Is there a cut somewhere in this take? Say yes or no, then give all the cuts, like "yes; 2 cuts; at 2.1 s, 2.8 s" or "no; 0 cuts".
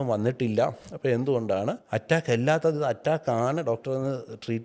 yes; 1 cut; at 1.8 s